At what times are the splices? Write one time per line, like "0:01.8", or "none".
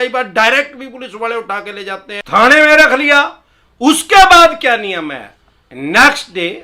0:02.3